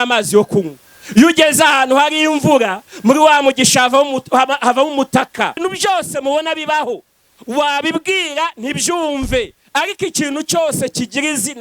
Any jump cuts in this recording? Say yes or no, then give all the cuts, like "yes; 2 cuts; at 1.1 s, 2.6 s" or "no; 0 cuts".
yes; 1 cut; at 5.6 s